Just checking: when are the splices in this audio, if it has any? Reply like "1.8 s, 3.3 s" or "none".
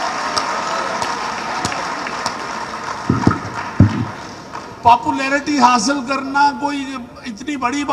none